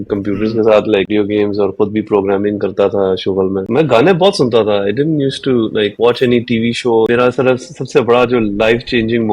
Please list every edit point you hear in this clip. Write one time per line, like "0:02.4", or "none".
0:01.1
0:03.6
0:07.1

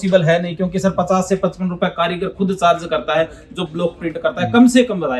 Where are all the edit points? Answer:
none

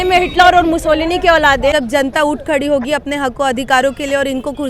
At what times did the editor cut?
0:01.7

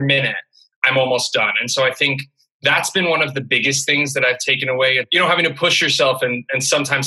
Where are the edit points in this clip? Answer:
0:05.1

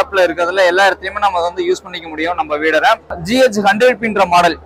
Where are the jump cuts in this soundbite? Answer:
0:03.1

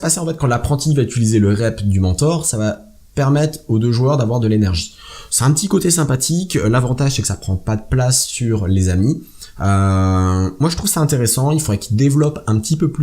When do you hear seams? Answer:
0:03.7

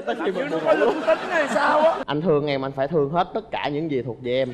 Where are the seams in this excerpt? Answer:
0:02.0

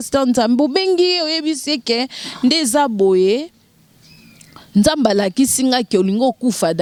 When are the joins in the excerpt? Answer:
none

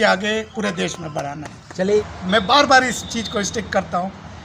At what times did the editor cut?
0:02.0

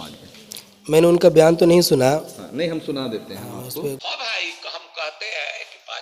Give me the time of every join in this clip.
0:04.0

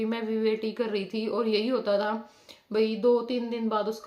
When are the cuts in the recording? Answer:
none

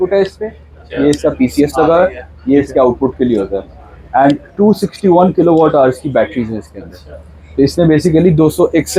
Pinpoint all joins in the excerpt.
none

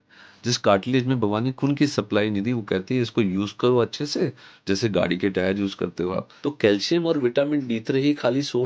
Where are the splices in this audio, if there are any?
0:06.3

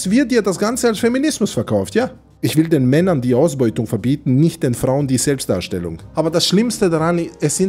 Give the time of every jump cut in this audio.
0:02.2
0:06.0

